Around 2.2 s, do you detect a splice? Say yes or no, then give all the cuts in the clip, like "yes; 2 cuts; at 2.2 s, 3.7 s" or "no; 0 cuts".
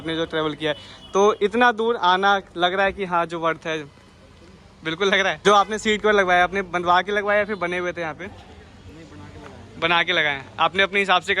no; 1 cut; at 5.4 s